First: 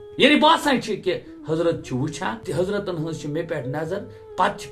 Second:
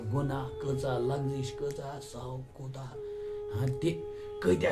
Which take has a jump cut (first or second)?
first